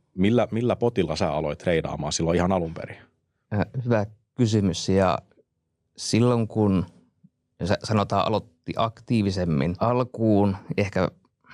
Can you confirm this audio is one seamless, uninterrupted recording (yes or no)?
no